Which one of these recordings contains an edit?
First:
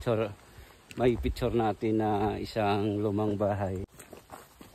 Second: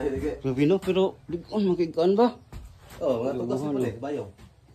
first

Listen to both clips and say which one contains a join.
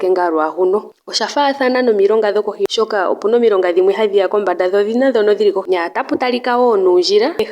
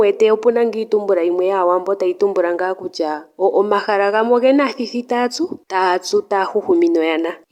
first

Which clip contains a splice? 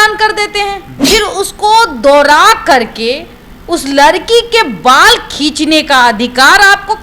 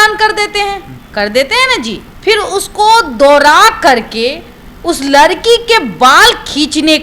first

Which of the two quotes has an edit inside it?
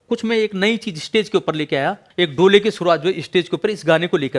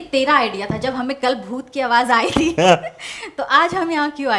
first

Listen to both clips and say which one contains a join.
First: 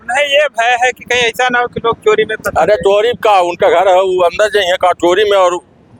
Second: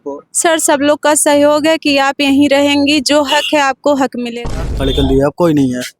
second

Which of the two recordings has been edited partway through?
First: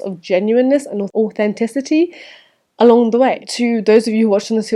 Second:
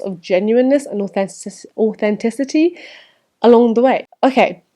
first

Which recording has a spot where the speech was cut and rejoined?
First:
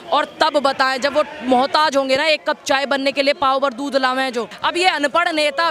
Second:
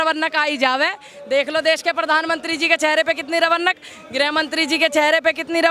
first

